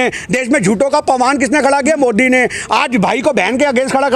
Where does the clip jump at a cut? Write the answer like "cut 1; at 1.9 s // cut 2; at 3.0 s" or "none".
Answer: none